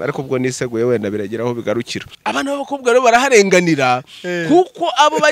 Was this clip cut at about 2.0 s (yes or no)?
yes